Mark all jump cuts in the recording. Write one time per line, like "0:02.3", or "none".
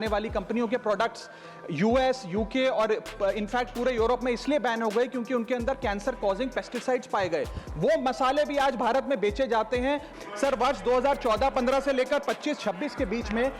0:10.1